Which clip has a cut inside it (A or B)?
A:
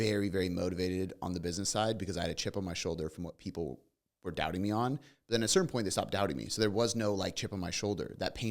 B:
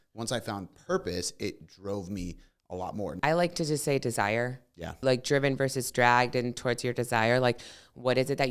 B